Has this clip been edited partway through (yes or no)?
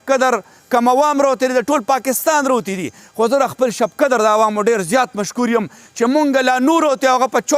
no